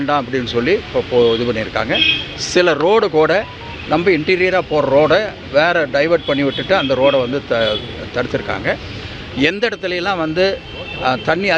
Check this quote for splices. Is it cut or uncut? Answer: uncut